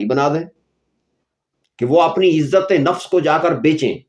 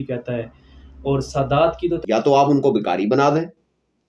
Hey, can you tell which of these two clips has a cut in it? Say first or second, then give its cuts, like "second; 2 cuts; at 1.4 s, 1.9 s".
second; 1 cut; at 2.0 s